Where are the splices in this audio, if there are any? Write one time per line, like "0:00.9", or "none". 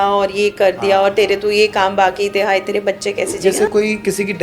0:03.4